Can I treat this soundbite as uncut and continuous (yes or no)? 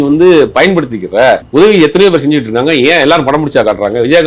no